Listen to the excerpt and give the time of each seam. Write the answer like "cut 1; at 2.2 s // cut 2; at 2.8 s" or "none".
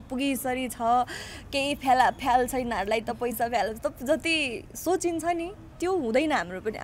none